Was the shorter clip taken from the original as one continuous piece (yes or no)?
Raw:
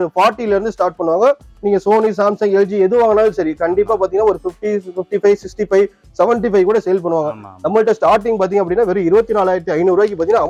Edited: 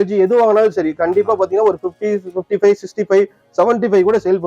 yes